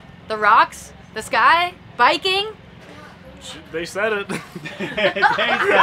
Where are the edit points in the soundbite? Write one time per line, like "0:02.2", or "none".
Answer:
none

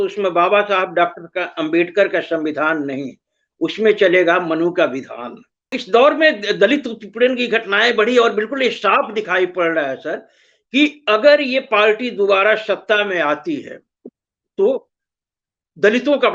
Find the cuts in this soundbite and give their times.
0:05.8

